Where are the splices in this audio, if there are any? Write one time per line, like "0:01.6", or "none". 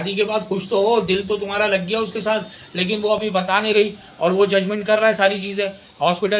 none